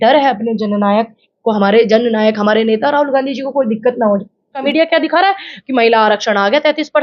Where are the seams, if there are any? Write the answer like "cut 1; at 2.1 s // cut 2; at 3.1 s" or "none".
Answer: cut 1; at 4.7 s